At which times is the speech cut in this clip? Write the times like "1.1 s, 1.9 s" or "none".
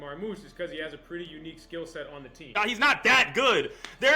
2.5 s